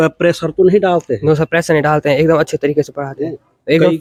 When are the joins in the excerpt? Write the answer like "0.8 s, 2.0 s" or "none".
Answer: none